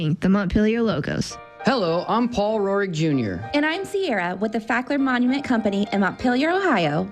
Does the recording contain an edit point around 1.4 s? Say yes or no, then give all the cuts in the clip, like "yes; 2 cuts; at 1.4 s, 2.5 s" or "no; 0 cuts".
yes; 1 cut; at 1.4 s